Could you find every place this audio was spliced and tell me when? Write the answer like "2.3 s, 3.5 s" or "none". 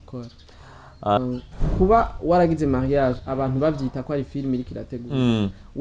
1.2 s

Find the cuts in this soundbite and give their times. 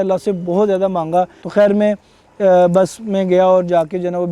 1.4 s

